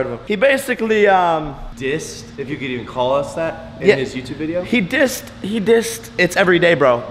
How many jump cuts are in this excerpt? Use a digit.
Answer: 0